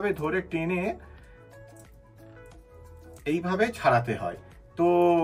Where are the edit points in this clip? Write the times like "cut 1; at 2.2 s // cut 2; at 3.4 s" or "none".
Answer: none